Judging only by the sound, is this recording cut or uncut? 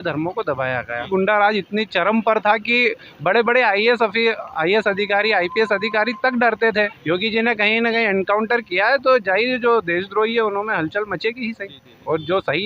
cut